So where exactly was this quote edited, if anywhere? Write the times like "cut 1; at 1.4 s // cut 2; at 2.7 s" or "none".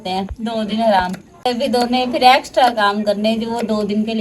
cut 1; at 1.5 s